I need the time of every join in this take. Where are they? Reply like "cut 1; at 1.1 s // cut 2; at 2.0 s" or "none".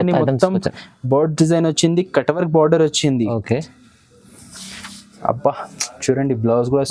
none